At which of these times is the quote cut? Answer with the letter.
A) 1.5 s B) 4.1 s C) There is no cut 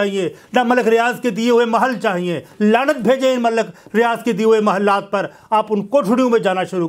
C